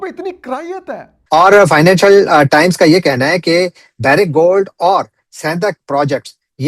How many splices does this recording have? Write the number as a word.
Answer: one